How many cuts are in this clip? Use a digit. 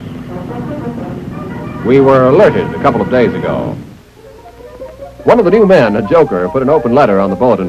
1